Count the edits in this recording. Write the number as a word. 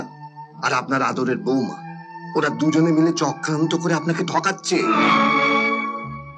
zero